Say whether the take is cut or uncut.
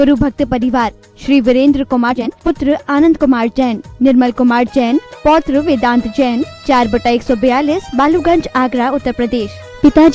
cut